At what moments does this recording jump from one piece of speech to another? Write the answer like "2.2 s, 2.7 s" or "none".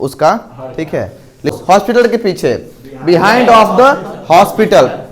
1.5 s